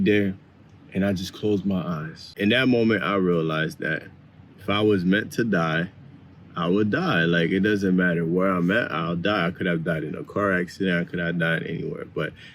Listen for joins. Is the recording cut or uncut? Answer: cut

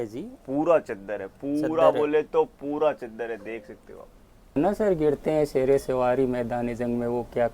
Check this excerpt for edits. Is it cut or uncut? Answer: cut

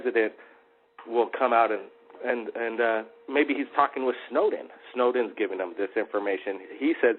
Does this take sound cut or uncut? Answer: uncut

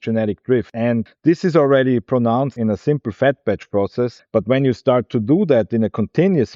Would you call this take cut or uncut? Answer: uncut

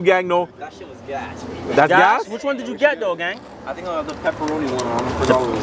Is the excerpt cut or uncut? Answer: uncut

